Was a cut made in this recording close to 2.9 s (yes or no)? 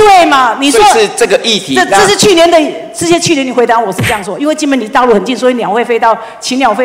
no